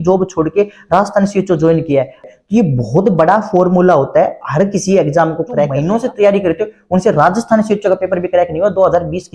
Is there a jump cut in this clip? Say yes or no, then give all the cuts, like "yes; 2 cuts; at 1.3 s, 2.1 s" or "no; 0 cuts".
yes; 2 cuts; at 2.2 s, 5.8 s